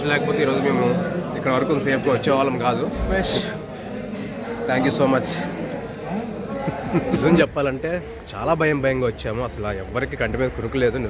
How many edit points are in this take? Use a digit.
2